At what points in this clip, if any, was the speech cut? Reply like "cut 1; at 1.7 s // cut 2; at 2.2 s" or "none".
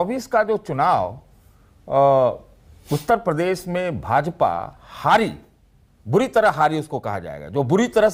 none

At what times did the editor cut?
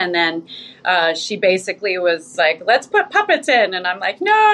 cut 1; at 2.3 s

